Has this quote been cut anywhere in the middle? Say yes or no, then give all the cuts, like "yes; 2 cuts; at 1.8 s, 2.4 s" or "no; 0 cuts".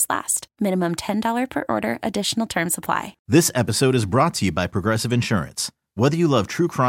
yes; 1 cut; at 3.1 s